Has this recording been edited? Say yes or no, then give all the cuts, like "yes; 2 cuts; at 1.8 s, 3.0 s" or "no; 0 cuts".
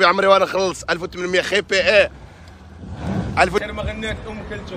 yes; 1 cut; at 3.6 s